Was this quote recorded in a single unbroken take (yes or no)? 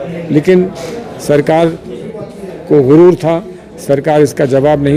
yes